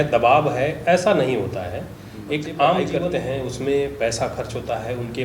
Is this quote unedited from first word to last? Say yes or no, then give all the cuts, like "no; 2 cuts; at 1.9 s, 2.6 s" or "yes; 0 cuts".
no; 1 cut; at 2.9 s